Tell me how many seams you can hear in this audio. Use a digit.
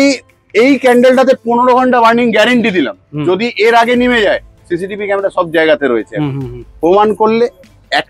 0